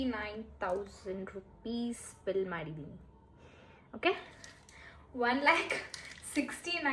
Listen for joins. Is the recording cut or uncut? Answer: uncut